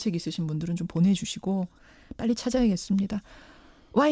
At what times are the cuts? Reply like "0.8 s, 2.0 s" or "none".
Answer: 2.7 s